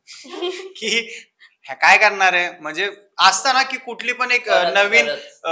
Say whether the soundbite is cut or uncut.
uncut